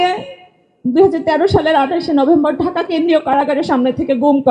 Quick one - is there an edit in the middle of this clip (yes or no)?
no